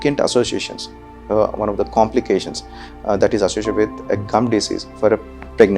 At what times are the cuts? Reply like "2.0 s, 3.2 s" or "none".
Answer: none